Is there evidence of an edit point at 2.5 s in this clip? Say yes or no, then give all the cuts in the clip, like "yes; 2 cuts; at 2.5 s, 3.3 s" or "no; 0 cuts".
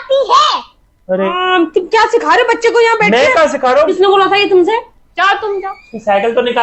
no; 3 cuts; at 1.3 s, 3.9 s, 5.0 s